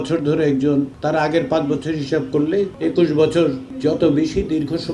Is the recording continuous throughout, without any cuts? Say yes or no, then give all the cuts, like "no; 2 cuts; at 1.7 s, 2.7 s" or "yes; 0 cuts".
no; 3 cuts; at 0.9 s, 2.7 s, 3.7 s